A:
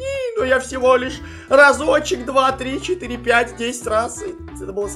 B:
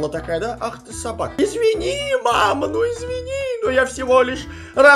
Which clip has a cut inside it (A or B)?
B